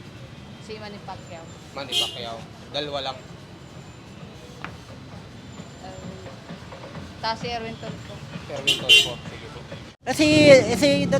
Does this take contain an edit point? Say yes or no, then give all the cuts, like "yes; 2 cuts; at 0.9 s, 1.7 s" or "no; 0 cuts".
yes; 1 cut; at 9.9 s